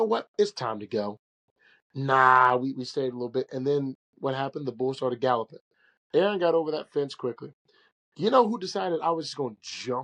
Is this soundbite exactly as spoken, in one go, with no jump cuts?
yes; 0 cuts

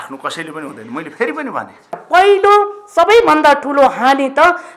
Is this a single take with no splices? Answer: no; 1 cut; at 2.0 s

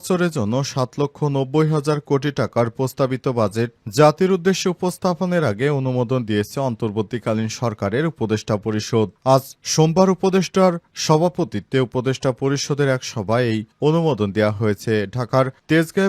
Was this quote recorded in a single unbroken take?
yes; 0 cuts

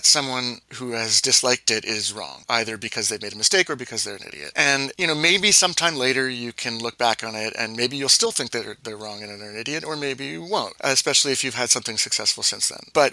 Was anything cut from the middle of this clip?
no; 0 cuts

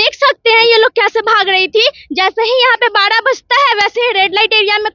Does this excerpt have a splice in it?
no; 0 cuts

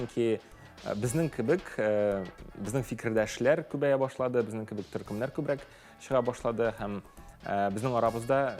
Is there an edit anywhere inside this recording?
no; 0 cuts

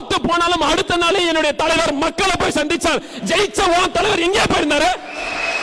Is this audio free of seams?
yes; 0 cuts

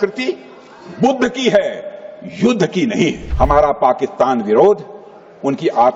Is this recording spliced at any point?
yes; 1 cut; at 3.2 s

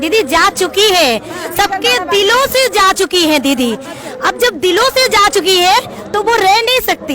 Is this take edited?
no; 0 cuts

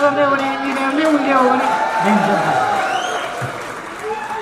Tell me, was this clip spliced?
no; 0 cuts

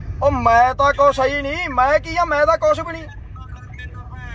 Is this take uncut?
yes; 0 cuts

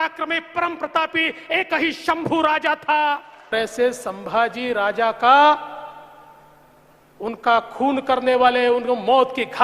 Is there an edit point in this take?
yes; 1 cut; at 3.5 s

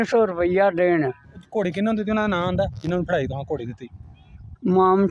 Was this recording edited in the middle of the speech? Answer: yes; 1 cut; at 1.4 s

